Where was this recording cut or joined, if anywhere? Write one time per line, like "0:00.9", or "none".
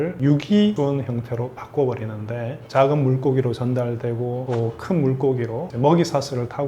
0:00.8
0:02.6
0:04.4